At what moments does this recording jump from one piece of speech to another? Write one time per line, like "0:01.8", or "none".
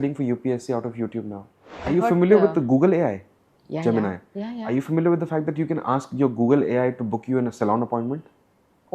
0:01.8